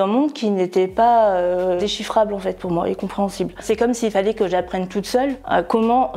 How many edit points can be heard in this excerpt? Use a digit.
2